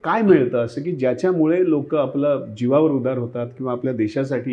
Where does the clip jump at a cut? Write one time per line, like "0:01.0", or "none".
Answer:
none